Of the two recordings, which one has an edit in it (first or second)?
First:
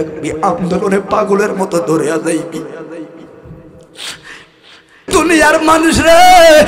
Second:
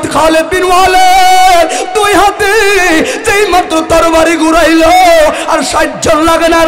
first